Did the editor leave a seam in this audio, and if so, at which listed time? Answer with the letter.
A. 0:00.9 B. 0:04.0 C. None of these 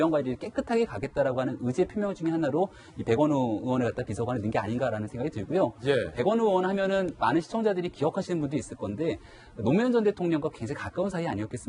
B